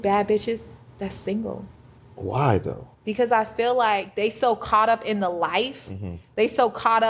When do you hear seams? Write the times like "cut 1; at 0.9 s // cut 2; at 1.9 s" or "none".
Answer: none